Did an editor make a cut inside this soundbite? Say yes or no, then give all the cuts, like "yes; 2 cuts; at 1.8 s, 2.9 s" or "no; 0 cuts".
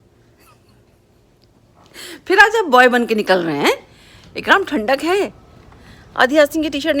no; 0 cuts